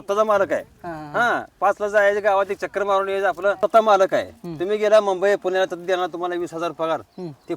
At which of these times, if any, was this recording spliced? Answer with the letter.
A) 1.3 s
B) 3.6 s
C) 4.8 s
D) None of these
B